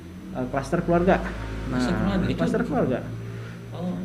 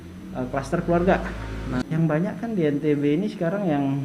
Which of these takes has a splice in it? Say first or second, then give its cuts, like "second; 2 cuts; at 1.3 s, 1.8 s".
second; 1 cut; at 1.8 s